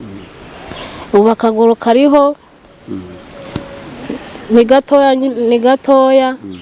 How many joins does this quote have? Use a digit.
0